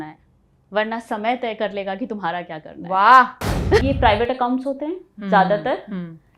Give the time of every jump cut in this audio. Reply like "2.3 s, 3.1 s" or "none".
3.8 s